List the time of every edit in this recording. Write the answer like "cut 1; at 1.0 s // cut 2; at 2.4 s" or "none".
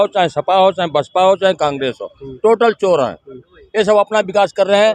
none